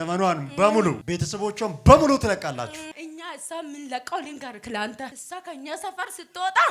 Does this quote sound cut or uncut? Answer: cut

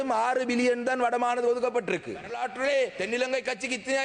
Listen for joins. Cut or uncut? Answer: cut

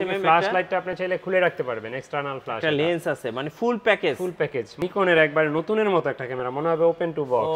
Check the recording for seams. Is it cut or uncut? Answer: cut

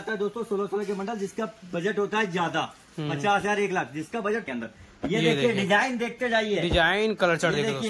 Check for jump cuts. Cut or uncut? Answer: cut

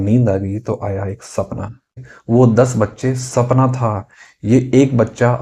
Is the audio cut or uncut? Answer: cut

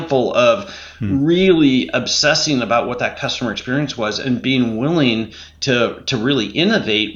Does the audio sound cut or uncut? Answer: uncut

